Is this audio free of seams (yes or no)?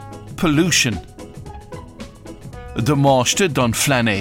no